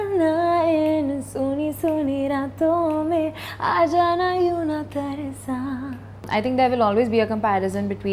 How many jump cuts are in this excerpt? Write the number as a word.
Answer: one